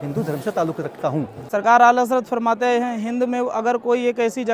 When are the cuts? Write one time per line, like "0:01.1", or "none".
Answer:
0:01.4